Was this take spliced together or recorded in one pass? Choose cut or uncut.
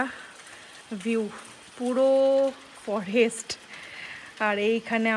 uncut